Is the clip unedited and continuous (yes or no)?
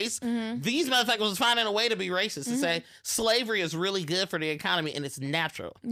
yes